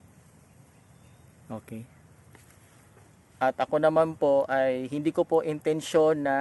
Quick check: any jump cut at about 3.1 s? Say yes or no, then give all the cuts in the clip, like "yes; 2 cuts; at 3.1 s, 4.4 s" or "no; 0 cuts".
yes; 1 cut; at 3.1 s